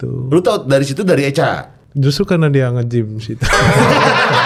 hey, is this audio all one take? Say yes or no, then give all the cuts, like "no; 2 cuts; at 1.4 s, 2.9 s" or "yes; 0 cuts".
yes; 0 cuts